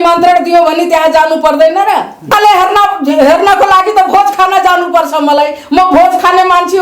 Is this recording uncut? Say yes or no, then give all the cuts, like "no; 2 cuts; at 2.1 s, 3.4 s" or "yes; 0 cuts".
no; 1 cut; at 2.3 s